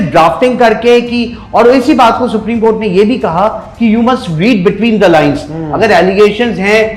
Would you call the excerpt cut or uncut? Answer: uncut